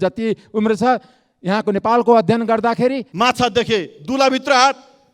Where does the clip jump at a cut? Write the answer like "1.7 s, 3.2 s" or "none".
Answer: 3.1 s